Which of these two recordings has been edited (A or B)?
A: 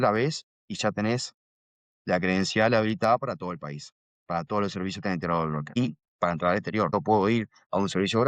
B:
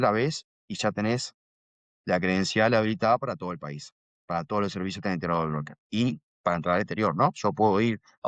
A